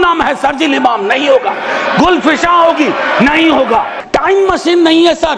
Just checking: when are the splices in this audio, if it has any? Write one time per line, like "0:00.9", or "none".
0:04.0